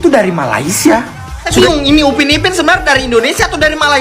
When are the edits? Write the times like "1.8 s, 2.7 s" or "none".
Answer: 1.5 s